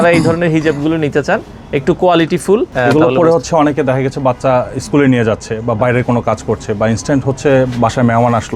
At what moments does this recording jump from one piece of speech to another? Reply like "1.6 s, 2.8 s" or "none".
2.7 s